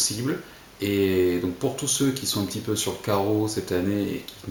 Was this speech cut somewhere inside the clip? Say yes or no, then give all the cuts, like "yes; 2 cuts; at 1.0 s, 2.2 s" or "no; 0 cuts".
no; 0 cuts